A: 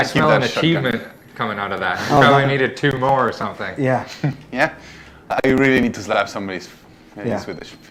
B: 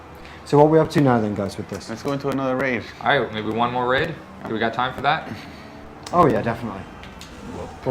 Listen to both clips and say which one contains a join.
B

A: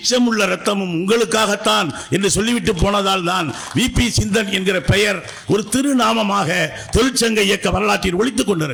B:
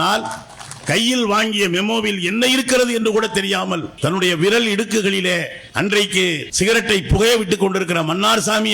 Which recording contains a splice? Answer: B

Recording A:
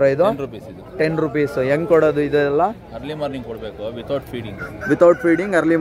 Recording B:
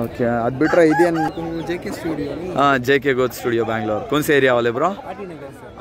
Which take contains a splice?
B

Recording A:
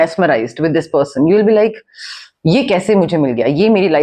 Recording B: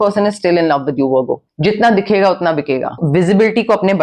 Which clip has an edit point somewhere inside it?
B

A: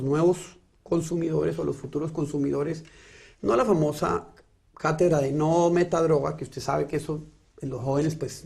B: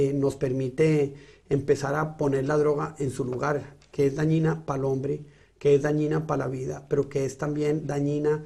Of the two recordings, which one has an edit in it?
A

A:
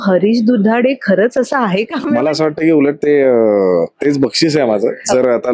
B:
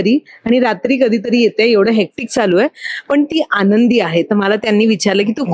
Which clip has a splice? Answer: A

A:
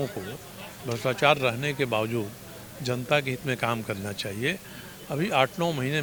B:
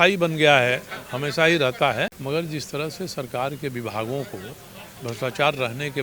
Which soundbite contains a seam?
B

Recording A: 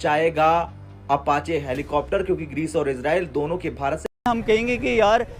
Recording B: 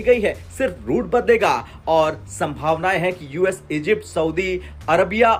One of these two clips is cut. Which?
A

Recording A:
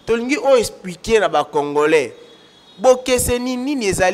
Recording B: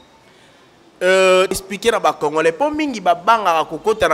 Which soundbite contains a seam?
B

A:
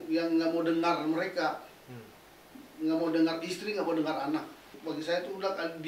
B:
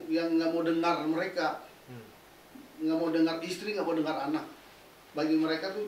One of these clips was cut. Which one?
A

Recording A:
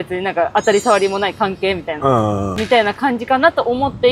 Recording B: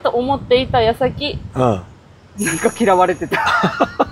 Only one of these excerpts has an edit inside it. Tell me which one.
A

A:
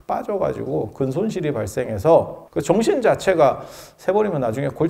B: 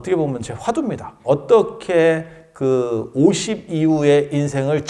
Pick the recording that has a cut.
A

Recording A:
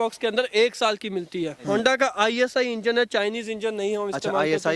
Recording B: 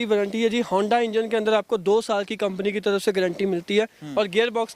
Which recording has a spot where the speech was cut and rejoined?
A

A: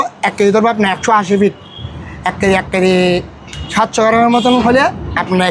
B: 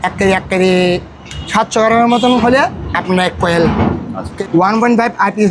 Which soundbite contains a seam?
B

